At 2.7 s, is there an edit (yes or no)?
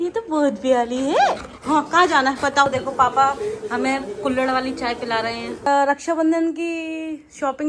yes